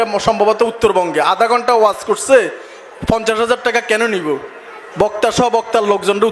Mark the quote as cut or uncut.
uncut